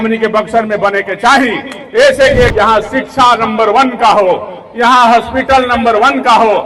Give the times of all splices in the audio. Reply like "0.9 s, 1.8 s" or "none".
2.5 s